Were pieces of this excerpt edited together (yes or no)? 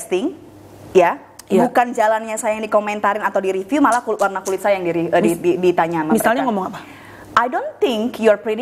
no